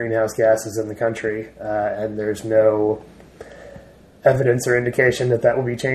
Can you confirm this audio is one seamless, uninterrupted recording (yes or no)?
yes